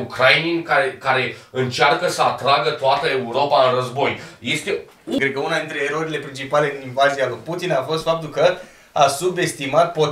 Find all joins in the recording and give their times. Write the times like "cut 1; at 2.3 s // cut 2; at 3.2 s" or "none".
cut 1; at 5.2 s